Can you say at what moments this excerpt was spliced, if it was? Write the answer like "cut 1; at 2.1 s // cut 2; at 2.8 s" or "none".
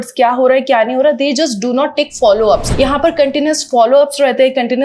cut 1; at 2.7 s